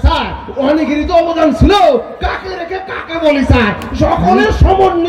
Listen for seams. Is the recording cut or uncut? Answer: uncut